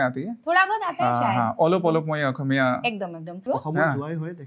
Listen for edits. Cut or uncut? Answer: cut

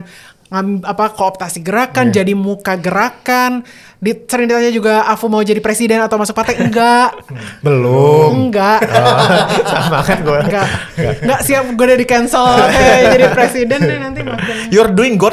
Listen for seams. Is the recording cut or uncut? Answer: uncut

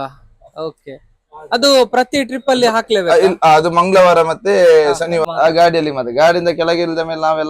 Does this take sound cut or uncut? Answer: cut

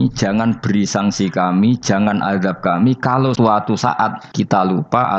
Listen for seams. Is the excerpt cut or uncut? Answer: cut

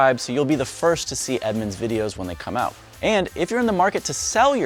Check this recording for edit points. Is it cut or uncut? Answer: uncut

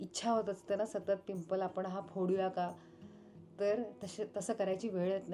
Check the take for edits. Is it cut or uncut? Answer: uncut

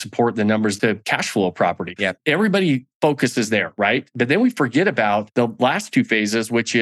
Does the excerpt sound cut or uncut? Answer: cut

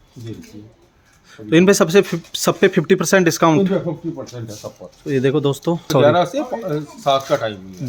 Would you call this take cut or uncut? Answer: uncut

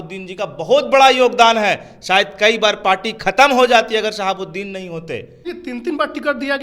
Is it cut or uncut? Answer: cut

